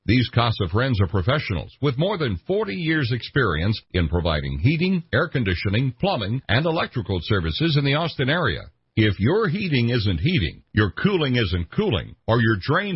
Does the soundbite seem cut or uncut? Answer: uncut